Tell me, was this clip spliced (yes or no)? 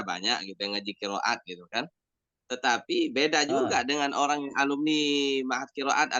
no